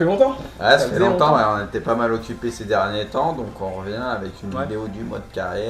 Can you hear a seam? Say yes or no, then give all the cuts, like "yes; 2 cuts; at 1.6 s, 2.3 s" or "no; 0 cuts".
yes; 1 cut; at 2.8 s